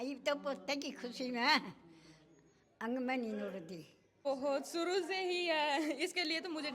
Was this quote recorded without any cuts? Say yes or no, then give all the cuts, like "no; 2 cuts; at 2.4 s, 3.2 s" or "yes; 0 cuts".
no; 1 cut; at 4.0 s